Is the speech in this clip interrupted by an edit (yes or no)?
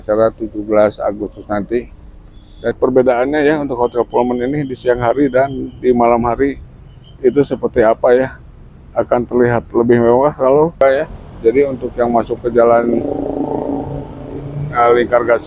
yes